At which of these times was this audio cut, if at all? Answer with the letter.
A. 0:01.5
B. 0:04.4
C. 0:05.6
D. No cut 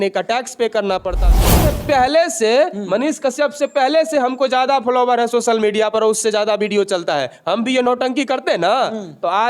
A